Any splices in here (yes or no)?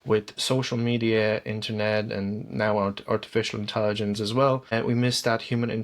yes